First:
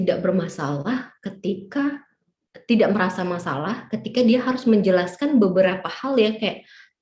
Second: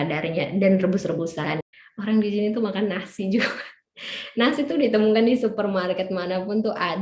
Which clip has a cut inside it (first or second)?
second